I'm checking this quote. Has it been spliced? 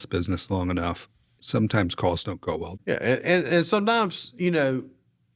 yes; 1 cut; at 1.3 s

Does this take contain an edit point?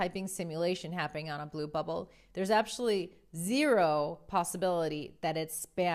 no; 0 cuts

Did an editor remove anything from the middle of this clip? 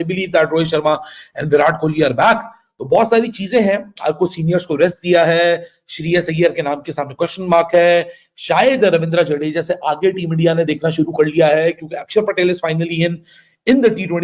no; 0 cuts

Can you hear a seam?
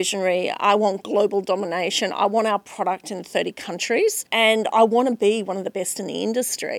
yes; 1 cut; at 4.2 s

